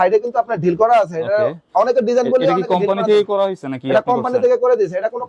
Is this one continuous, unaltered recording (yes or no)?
yes